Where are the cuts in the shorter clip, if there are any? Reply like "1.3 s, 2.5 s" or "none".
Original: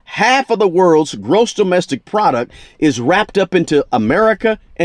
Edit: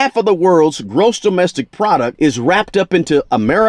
2.1 s